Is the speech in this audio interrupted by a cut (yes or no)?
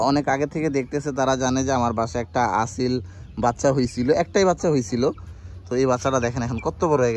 no